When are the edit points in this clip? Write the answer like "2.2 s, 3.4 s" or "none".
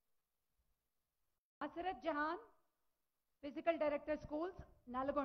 none